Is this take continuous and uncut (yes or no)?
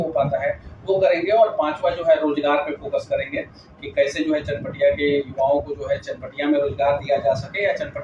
yes